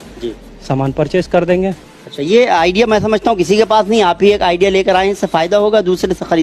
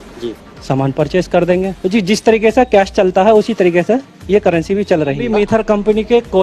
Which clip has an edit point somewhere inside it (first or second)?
second